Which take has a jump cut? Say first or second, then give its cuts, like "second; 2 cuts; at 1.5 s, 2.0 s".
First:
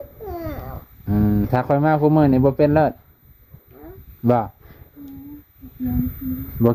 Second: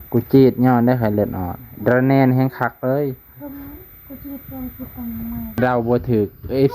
second; 1 cut; at 5.6 s